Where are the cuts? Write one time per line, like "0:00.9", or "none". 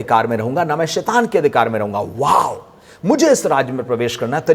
none